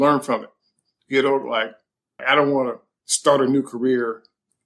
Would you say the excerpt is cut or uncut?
cut